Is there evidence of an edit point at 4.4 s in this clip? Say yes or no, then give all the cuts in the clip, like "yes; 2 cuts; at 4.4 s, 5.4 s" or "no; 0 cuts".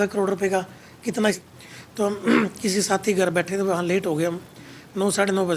no; 1 cut; at 1.4 s